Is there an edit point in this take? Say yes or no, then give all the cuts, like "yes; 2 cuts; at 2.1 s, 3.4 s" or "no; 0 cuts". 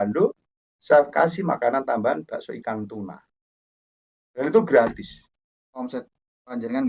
yes; 1 cut; at 5.2 s